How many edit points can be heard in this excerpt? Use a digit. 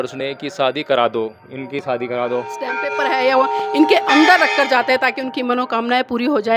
1